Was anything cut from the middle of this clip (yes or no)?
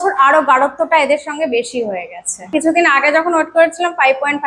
yes